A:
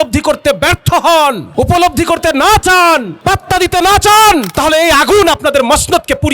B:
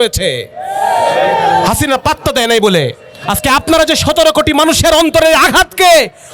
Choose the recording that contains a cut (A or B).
A